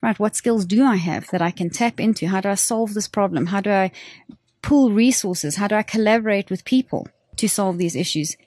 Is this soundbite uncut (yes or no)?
yes